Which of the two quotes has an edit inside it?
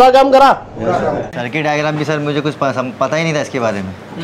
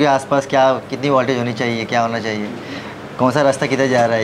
first; 1 cut; at 1.4 s

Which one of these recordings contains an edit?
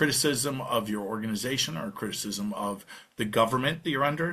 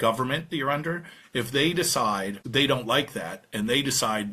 second; 1 cut; at 2.4 s

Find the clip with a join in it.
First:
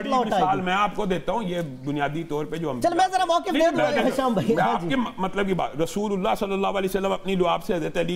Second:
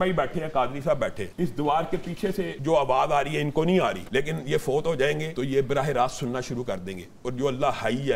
second; 4 cuts; at 1.2 s, 2.5 s, 4.0 s, 5.3 s

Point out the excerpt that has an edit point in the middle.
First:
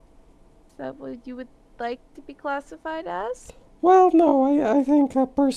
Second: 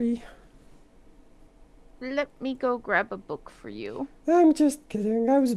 second; 1 cut; at 1.5 s

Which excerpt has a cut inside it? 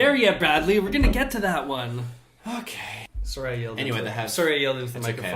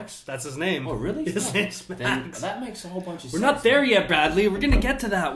first; 1 cut; at 3.1 s

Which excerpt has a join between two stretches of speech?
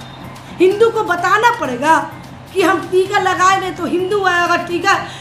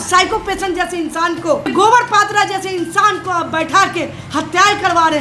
second; 1 cut; at 1.7 s

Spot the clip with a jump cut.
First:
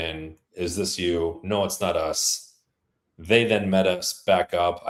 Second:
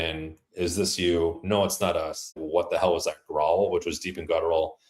second; 1 cut; at 2.4 s

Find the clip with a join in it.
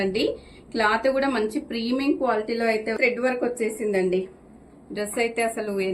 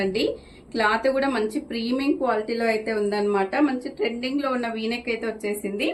first; 1 cut; at 2.9 s

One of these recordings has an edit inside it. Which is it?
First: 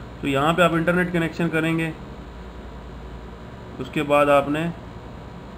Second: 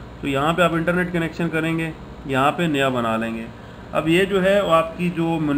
second; 1 cut; at 2.1 s

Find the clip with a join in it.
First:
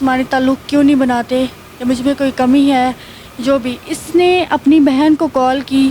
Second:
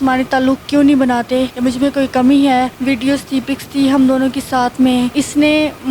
second; 3 cuts; at 1.5 s, 2.8 s, 5.1 s

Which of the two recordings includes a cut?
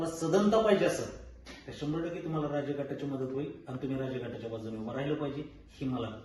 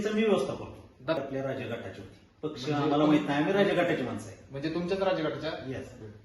second; 1 cut; at 1.2 s

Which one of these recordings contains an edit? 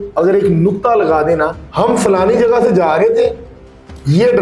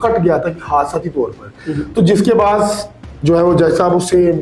first; 1 cut; at 1.6 s

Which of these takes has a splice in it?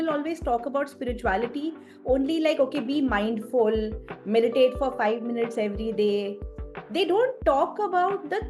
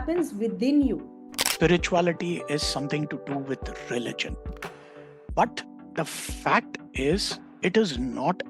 second; 1 cut; at 1.5 s

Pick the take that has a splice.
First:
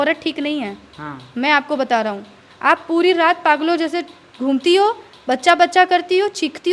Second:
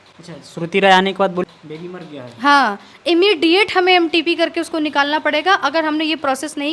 second; 1 cut; at 1.4 s

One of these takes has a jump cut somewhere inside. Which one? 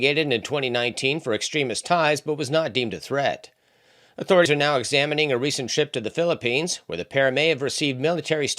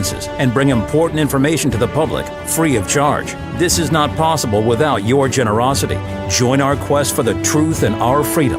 first; 1 cut; at 4.5 s

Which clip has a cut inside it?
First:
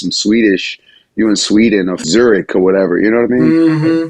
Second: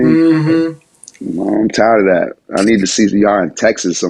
first; 1 cut; at 2.0 s

